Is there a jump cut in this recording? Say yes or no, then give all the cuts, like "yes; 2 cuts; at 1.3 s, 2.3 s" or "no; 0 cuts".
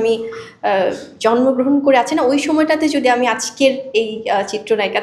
no; 0 cuts